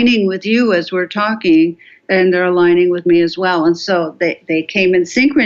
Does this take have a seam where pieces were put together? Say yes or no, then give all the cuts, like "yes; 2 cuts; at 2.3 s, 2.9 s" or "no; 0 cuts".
yes; 1 cut; at 2.0 s